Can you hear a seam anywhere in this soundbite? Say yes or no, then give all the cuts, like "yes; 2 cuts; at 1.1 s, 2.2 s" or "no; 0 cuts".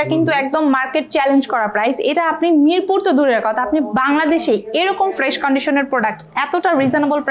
no; 0 cuts